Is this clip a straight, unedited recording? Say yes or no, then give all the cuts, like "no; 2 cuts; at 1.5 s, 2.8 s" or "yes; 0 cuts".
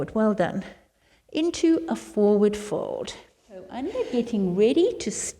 no; 1 cut; at 3.7 s